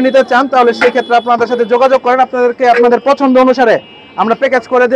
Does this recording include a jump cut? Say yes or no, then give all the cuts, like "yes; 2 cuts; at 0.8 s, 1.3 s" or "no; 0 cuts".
no; 0 cuts